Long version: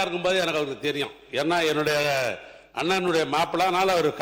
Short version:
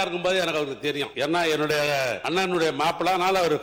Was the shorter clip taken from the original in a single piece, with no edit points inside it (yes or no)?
no